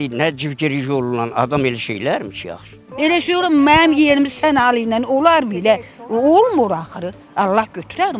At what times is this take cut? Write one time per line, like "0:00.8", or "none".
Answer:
0:02.9

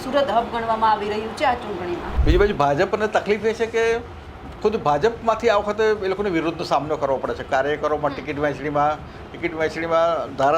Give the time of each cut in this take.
0:02.1

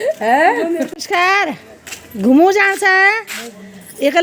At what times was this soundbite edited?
0:00.9

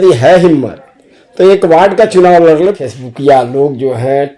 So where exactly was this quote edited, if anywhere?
0:02.8

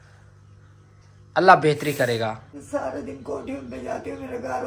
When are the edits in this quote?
0:02.5

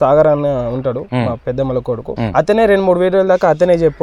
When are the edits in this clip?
0:01.0
0:02.1

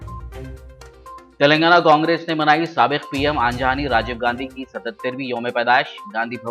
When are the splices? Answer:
none

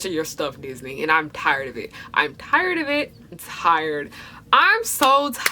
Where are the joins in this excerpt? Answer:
0:03.2

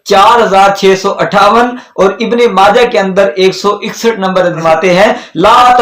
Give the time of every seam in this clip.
0:04.6

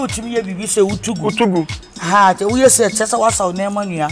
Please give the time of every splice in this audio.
none

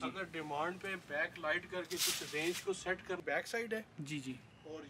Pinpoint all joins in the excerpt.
0:03.2

